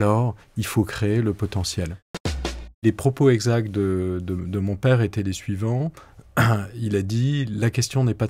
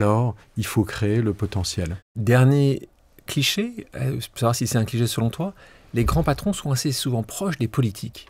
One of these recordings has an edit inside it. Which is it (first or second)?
first